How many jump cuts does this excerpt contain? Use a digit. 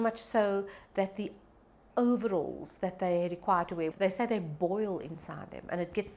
1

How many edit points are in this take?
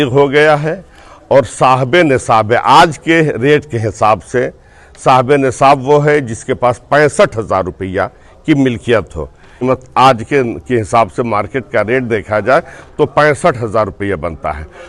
0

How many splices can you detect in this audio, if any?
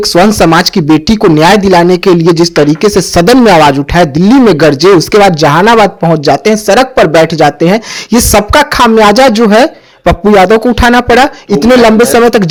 0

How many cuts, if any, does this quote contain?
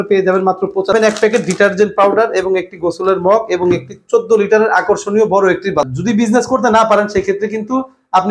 2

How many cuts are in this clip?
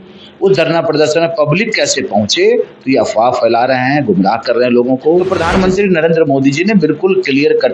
1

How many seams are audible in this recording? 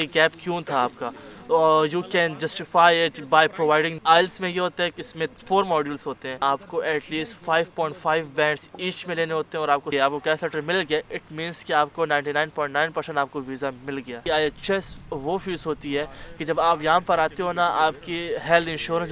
4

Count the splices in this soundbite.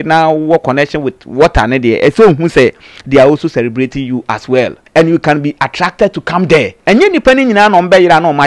2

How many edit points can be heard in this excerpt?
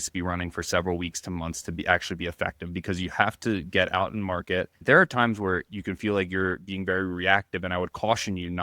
1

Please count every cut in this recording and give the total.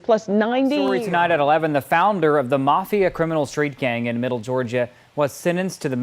1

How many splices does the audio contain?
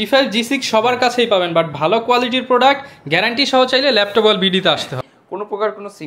1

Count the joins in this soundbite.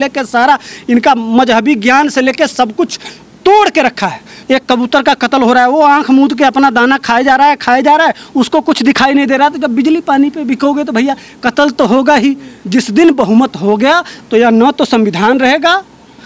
2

